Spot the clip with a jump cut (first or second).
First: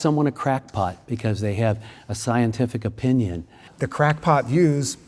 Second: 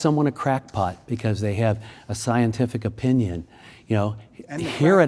first